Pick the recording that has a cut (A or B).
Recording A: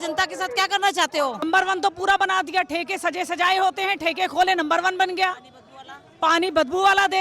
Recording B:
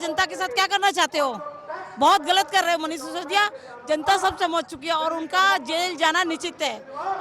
A